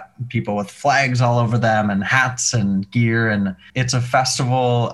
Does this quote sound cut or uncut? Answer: cut